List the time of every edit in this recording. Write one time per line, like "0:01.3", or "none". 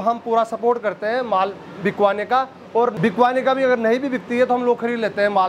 0:03.0